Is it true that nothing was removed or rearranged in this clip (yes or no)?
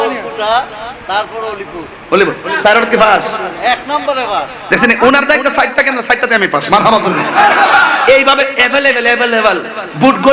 yes